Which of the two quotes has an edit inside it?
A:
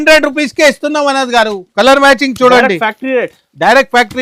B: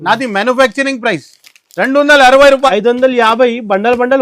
B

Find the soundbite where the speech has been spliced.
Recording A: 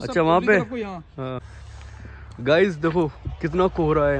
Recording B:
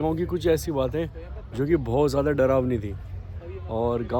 A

